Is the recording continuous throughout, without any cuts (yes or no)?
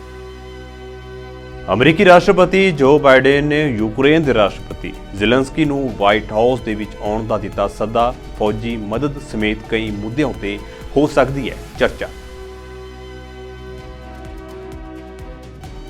no